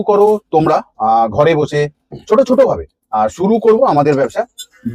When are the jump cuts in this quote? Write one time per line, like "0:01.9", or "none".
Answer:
none